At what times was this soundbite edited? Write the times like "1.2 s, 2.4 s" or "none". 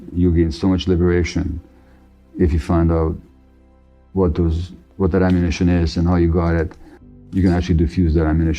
7.2 s